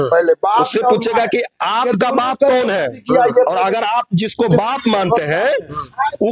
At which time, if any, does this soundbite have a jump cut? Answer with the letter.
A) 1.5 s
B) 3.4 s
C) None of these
C